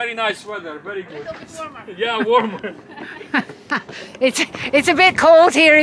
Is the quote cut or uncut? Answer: uncut